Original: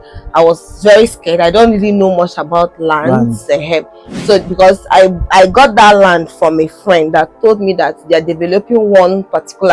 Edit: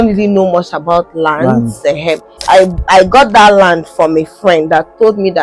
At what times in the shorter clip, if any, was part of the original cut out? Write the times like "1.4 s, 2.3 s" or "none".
2.4 s